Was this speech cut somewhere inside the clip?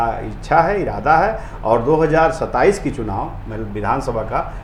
no; 0 cuts

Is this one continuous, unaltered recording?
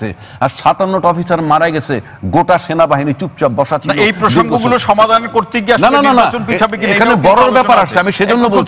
yes; 0 cuts

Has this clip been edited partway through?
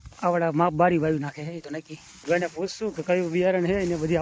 yes; 1 cut; at 2.2 s

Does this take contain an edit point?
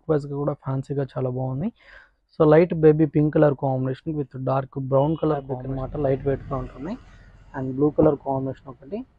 yes; 1 cut; at 5.6 s

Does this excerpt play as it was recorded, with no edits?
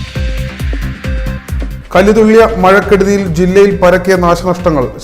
no; 1 cut; at 1.2 s

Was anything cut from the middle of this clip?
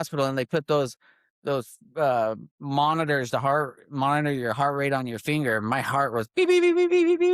no; 0 cuts

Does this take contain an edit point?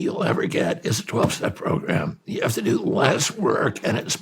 yes; 1 cut; at 2.2 s

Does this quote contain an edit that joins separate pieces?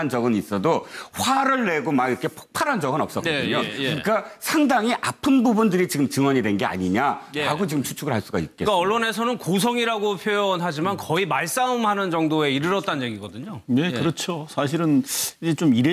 yes; 1 cut; at 6.7 s

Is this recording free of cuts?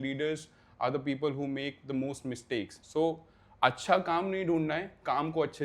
no; 1 cut; at 2.8 s

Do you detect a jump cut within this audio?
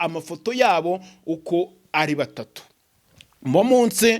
no; 0 cuts

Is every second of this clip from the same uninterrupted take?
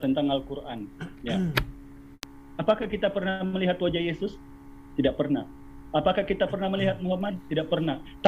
no; 1 cut; at 2.1 s

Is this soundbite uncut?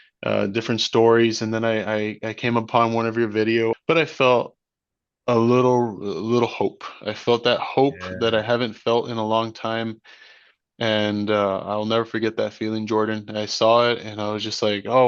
no; 1 cut; at 3.8 s

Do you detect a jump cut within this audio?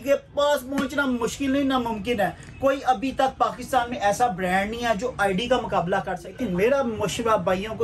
yes; 1 cut; at 6.3 s

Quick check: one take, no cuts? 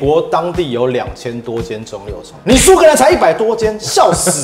yes; 0 cuts

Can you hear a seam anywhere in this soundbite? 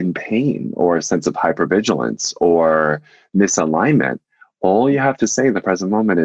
no; 0 cuts

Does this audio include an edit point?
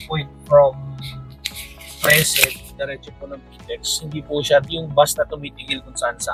no; 0 cuts

